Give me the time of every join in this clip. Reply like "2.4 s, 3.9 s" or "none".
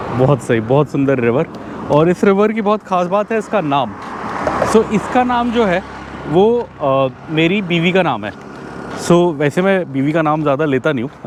none